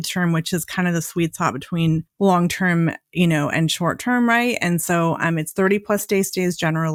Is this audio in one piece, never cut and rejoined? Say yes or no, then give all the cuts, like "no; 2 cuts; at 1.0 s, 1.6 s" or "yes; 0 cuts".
yes; 0 cuts